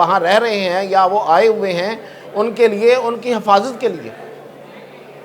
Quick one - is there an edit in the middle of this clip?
no; 0 cuts

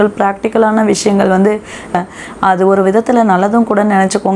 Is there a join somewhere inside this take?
yes; 1 cut; at 1.9 s

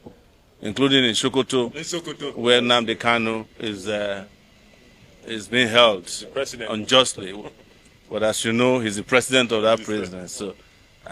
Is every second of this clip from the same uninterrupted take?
yes; 0 cuts

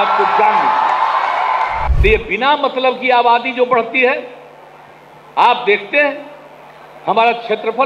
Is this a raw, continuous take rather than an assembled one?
no; 1 cut; at 1.9 s

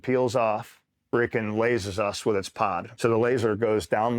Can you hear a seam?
yes; 2 cuts; at 1.0 s, 2.9 s

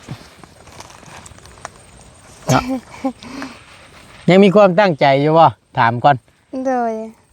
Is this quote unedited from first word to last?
yes; 0 cuts

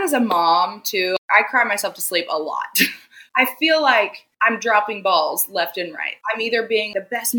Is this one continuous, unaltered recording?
no; 1 cut; at 1.2 s

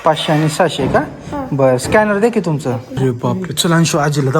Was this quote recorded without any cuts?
no; 1 cut; at 3.0 s

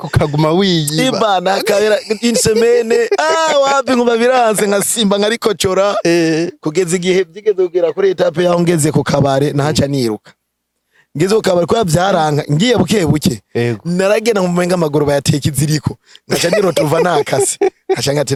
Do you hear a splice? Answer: no; 0 cuts

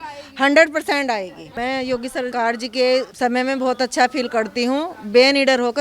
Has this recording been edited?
yes; 3 cuts; at 1.4 s, 2.3 s, 3.1 s

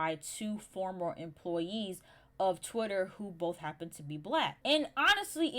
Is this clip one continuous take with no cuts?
no; 1 cut; at 4.6 s

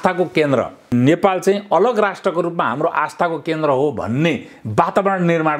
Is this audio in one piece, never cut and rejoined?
no; 1 cut; at 0.9 s

